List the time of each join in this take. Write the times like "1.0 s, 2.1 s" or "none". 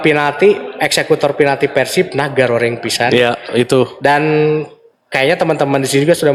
none